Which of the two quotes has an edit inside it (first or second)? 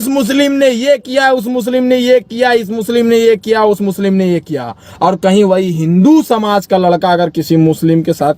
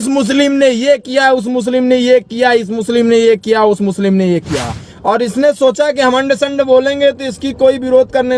second